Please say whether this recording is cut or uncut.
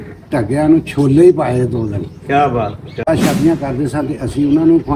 cut